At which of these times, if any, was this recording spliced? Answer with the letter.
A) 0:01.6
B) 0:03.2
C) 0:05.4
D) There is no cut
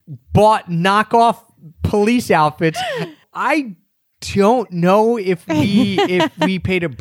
B